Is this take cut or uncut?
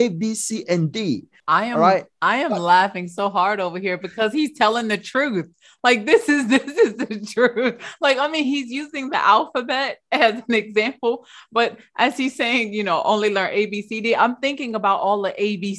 cut